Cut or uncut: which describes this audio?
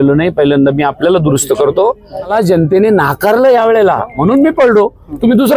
cut